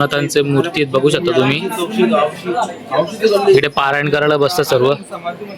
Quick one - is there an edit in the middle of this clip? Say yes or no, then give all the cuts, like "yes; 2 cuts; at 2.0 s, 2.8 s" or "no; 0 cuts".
no; 0 cuts